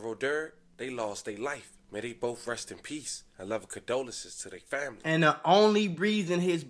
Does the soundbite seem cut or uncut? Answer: uncut